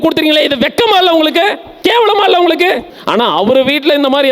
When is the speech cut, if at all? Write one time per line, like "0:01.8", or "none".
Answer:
0:01.7
0:02.9